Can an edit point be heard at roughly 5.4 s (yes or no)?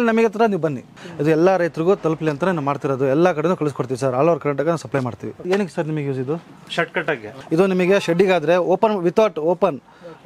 yes